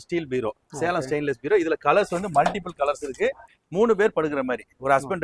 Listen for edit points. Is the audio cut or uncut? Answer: cut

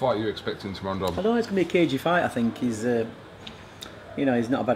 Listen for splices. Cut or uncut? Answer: uncut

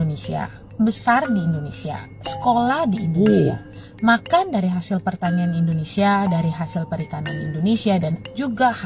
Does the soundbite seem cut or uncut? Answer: uncut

